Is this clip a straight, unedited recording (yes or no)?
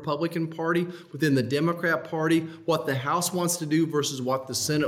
yes